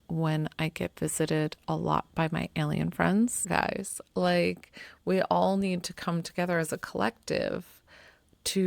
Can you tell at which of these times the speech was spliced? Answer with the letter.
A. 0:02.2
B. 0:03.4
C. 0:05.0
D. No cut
B